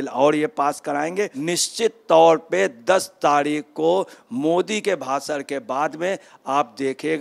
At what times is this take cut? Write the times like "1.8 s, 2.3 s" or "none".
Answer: 1.4 s